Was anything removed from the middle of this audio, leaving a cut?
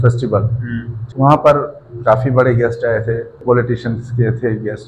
yes; 2 cuts; at 1.0 s, 3.4 s

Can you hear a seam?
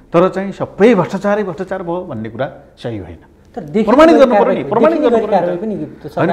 no; 0 cuts

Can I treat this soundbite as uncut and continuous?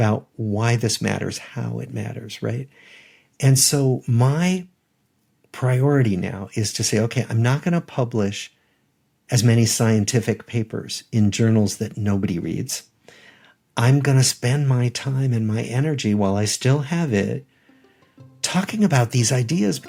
yes; 0 cuts

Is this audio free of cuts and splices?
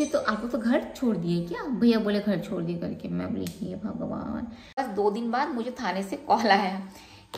no; 1 cut; at 4.7 s

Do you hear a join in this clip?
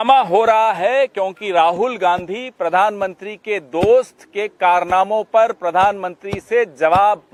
no; 0 cuts

